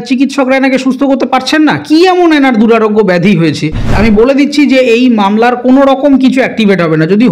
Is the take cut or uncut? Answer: cut